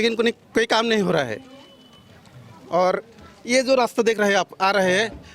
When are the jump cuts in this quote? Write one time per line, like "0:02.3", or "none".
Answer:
none